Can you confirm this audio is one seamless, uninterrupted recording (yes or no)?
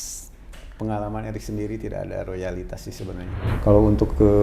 no